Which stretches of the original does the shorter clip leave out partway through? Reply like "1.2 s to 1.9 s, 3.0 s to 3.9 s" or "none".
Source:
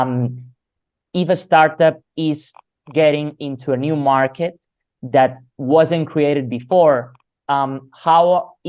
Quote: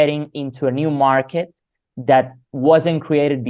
none